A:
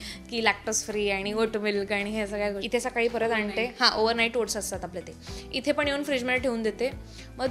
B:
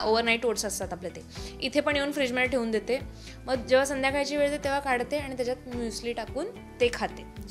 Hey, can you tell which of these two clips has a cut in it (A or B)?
A